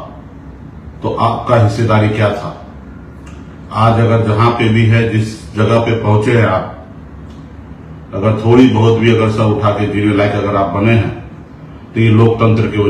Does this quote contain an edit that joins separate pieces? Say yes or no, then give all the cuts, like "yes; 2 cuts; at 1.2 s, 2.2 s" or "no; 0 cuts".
no; 0 cuts